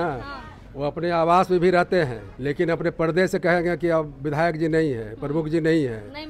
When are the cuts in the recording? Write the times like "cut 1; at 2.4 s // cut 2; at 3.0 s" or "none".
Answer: cut 1; at 2.3 s